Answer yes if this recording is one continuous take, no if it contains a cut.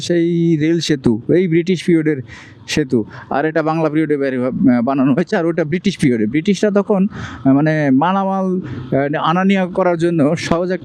yes